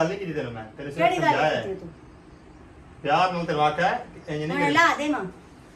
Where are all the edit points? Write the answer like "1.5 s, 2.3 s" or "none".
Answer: none